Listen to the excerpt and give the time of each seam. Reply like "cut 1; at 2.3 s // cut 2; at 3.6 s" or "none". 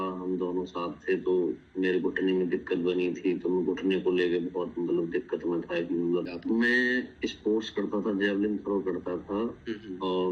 cut 1; at 6.3 s